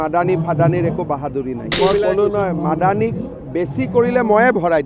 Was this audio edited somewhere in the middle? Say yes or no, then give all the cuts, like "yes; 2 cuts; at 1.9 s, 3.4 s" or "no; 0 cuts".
yes; 1 cut; at 1.7 s